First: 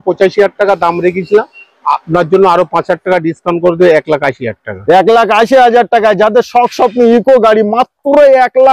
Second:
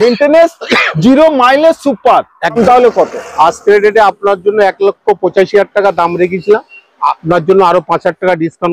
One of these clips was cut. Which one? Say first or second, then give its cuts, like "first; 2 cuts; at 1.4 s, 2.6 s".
second; 1 cut; at 2.6 s